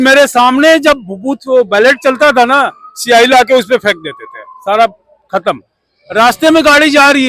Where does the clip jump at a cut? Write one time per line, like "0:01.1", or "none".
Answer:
none